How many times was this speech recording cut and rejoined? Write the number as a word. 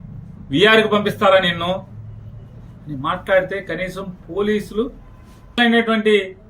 one